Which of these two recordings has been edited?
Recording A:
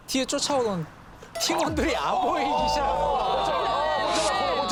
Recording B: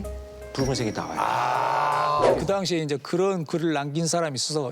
B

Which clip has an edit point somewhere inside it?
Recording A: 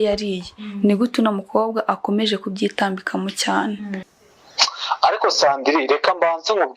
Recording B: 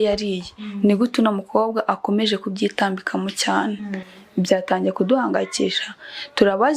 A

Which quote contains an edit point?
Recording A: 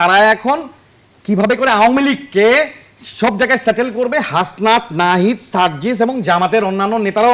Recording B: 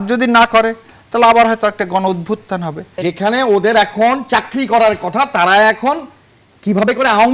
B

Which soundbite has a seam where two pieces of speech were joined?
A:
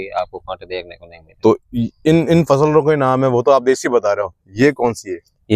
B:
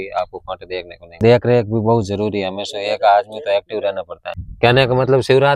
B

